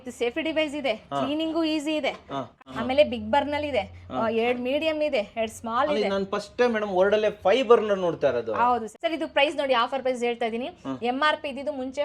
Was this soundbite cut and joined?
no; 0 cuts

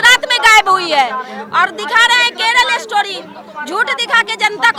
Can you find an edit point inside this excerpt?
no; 0 cuts

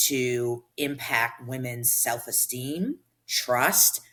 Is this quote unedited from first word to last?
yes; 0 cuts

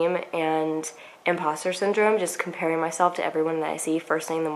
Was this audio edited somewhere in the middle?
no; 0 cuts

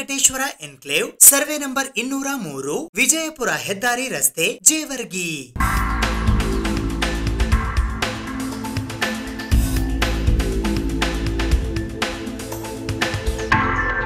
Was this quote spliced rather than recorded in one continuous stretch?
no; 0 cuts

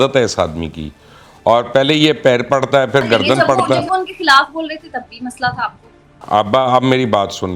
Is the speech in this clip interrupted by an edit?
no; 0 cuts

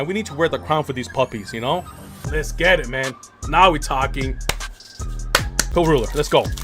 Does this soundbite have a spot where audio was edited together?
yes; 1 cut; at 5.6 s

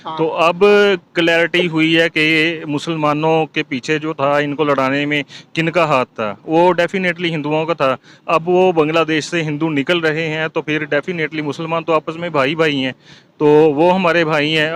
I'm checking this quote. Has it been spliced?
no; 0 cuts

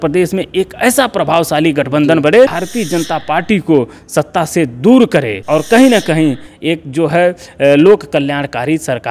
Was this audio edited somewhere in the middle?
yes; 2 cuts; at 2.6 s, 5.4 s

